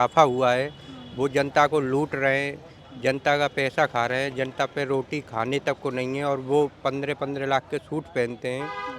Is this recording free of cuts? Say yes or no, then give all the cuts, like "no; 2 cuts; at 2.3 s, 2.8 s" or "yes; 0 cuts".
yes; 0 cuts